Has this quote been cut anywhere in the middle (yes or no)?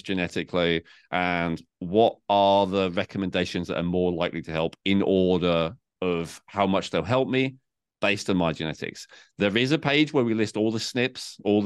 no